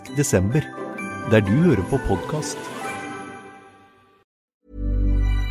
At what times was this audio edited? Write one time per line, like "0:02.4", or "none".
0:04.5